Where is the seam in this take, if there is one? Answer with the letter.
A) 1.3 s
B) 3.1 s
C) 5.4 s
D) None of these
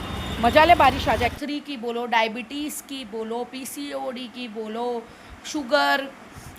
A